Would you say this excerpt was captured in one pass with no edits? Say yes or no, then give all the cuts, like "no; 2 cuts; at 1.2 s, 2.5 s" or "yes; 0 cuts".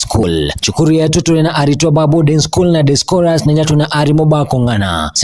yes; 0 cuts